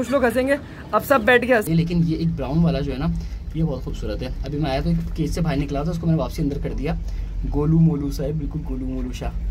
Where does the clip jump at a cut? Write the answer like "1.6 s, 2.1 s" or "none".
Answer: 1.6 s